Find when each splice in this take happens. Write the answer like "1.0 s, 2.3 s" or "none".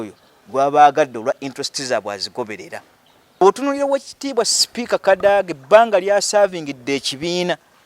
3.4 s